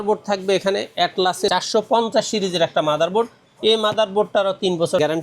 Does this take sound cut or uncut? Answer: uncut